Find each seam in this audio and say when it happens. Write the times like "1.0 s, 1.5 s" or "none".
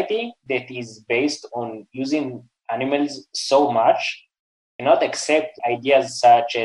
none